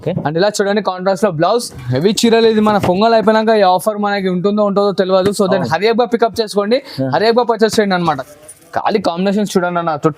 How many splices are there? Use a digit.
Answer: 2